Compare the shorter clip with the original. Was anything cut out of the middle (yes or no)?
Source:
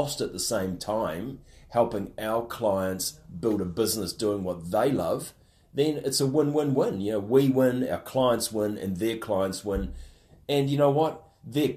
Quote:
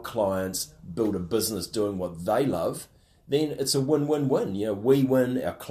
no